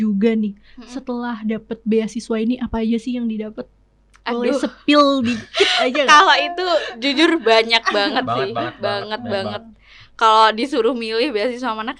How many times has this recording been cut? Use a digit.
0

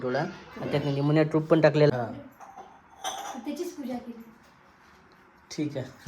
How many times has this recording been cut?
1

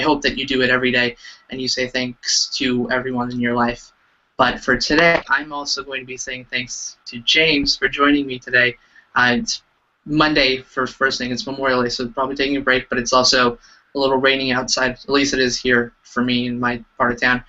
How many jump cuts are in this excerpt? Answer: 1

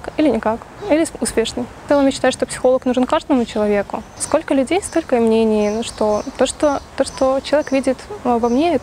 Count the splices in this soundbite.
2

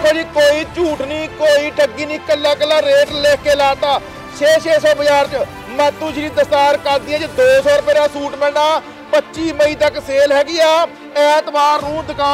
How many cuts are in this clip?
0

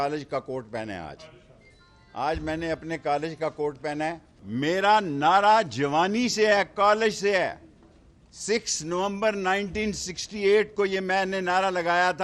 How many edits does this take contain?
1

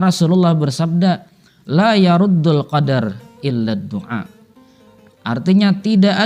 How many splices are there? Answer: 0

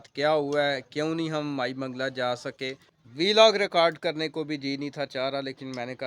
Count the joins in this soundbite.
1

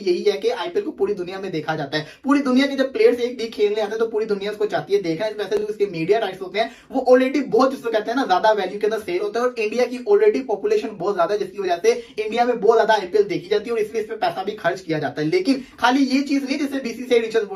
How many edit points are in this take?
0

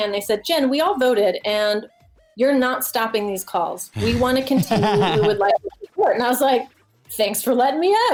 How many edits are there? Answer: 0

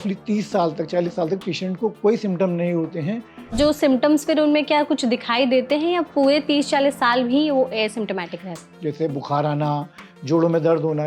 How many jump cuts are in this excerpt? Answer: 2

